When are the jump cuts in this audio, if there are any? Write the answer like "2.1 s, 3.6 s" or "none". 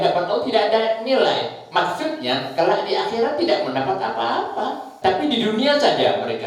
4.9 s